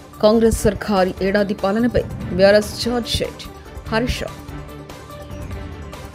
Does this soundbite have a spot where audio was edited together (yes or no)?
no